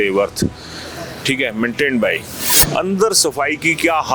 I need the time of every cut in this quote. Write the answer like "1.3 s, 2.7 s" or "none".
2.5 s